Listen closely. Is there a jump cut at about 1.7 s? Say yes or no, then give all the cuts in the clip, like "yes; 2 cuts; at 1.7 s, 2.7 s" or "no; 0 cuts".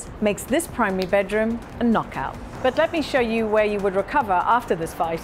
yes; 2 cuts; at 1.7 s, 2.4 s